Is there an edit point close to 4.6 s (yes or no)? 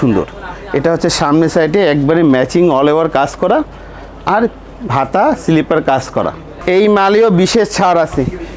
no